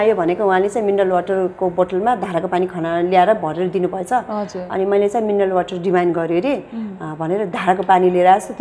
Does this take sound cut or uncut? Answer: uncut